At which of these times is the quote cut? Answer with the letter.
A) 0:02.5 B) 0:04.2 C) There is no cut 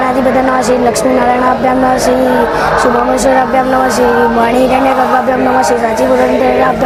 C